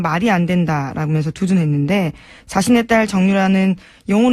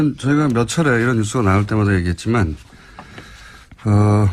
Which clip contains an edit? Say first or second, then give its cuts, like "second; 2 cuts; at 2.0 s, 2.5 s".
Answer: first; 1 cut; at 1.9 s